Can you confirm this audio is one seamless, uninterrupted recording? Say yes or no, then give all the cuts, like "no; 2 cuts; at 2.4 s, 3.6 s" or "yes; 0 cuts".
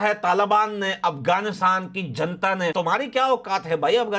yes; 0 cuts